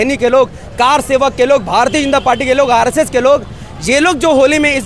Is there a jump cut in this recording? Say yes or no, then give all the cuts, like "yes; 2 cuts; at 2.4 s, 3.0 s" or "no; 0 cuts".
no; 0 cuts